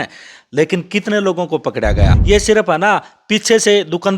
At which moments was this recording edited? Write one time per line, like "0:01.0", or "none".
0:02.1